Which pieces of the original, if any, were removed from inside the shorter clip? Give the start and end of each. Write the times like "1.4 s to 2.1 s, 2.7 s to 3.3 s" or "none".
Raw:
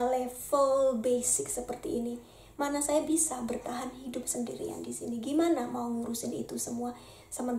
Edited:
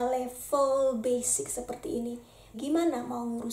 2.5 s to 5.2 s